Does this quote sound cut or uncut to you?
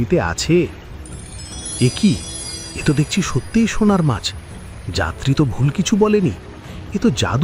uncut